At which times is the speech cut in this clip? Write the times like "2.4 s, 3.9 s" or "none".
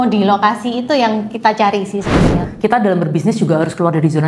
2.5 s